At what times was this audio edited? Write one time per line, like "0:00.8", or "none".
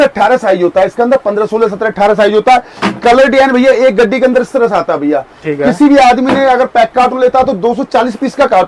none

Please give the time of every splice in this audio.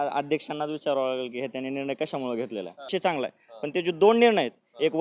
0:02.8

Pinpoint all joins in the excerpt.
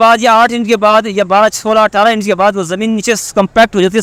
none

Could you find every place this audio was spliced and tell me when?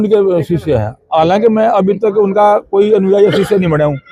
none

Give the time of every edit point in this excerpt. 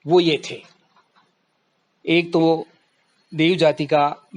none

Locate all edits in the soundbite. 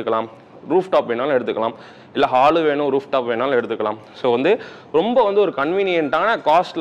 none

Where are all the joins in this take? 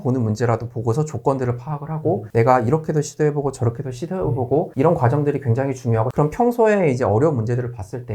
0:06.1

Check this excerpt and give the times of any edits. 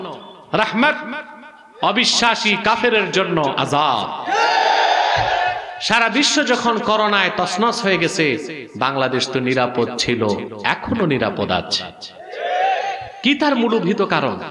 0:05.7
0:10.5
0:13.1

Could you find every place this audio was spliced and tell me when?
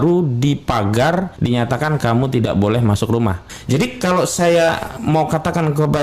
0:01.3
0:03.5

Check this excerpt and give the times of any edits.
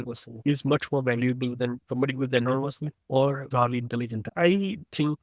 0:02.9
0:04.2

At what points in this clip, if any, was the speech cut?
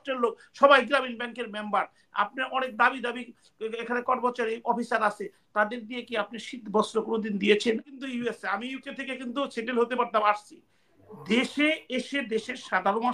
0:07.8

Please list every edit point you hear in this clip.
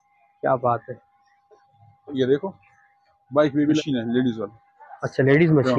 0:03.8

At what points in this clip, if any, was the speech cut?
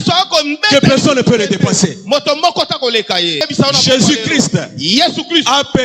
0:03.4

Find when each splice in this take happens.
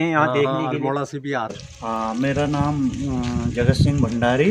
0:01.5

